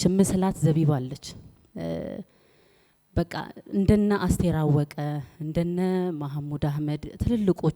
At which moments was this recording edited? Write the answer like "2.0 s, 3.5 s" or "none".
none